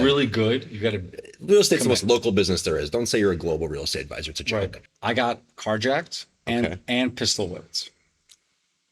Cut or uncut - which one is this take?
cut